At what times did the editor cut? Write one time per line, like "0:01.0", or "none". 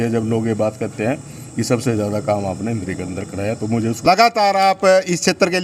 0:04.1